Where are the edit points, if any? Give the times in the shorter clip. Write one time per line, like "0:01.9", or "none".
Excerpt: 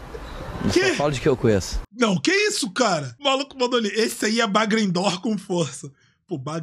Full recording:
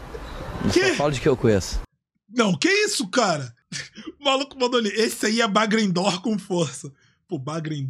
0:01.8
0:03.1